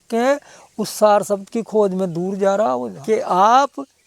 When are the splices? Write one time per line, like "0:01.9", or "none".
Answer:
0:02.9